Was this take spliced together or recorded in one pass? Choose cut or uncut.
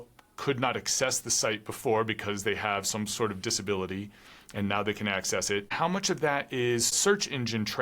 cut